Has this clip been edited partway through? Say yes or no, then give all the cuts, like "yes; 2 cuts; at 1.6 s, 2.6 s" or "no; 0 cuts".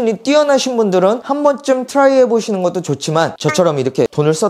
no; 0 cuts